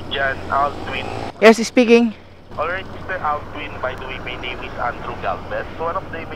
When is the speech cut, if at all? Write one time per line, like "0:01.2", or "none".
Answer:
none